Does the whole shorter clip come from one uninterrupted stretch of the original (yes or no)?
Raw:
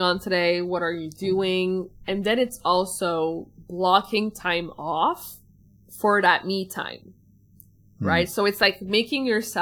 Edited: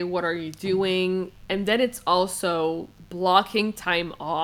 yes